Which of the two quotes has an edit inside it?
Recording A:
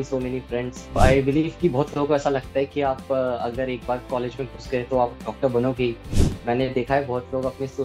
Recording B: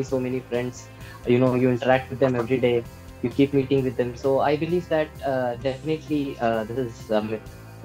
A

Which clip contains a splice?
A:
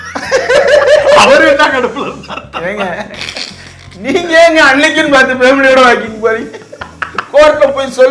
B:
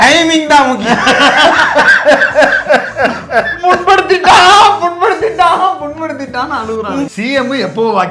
B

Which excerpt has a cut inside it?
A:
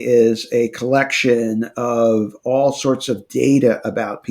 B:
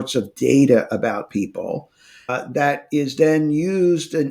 B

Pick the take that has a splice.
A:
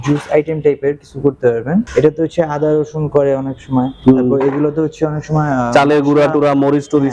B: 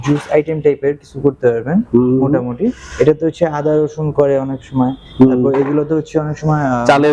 A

